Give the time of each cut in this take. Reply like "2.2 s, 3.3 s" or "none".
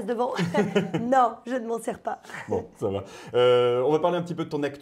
none